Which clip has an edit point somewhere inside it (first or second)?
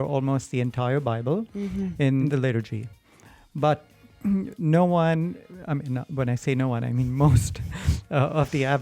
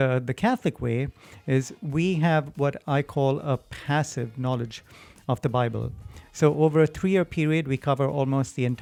first